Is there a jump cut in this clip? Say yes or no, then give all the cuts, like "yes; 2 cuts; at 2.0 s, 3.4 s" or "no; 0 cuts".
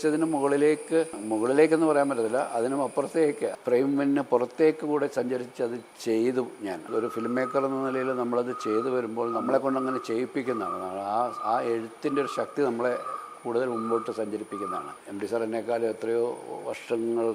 yes; 6 cuts; at 1.2 s, 3.5 s, 5.9 s, 6.9 s, 9.4 s, 15.0 s